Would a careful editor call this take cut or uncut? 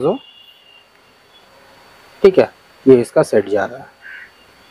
uncut